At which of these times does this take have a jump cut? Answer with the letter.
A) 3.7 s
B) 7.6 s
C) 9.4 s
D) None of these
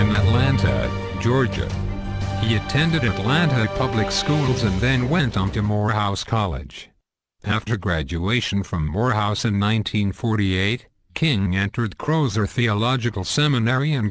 B